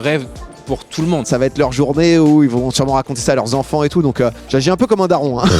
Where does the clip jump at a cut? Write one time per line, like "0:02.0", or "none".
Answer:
0:01.3
0:04.4